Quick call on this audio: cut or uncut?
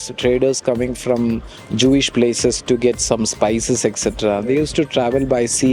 uncut